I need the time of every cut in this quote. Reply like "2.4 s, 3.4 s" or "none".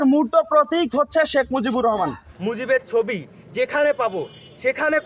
2.2 s

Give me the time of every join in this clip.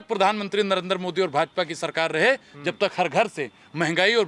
none

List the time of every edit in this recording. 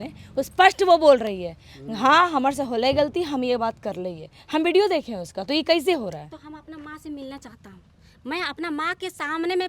none

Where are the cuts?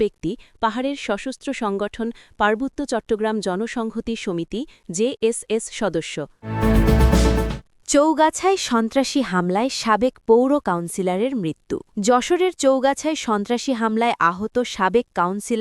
6.4 s, 7.6 s, 11.9 s

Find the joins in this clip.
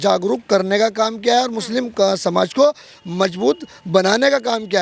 none

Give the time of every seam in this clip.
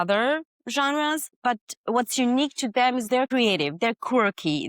1.3 s, 3.2 s

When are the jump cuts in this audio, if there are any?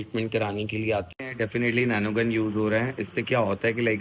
1.1 s

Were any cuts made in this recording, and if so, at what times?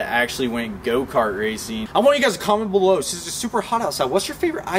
1.8 s

